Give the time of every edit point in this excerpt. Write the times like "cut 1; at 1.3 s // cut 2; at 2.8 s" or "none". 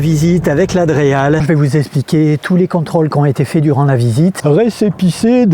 cut 1; at 1.4 s // cut 2; at 4.4 s